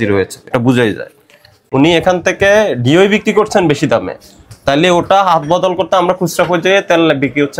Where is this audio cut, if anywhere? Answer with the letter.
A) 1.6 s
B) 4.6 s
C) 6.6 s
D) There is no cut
A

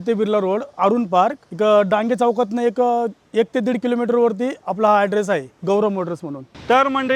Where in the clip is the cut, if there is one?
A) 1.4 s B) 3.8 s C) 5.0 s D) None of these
A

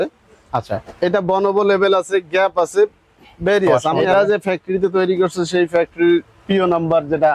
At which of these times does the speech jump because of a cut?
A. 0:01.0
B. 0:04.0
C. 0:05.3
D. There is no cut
B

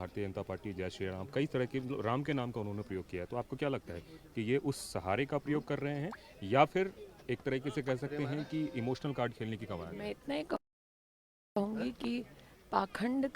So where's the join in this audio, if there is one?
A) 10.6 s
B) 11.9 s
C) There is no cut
C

